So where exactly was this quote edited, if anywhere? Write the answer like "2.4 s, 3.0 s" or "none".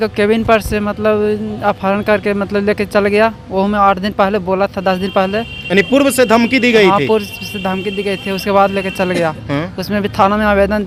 none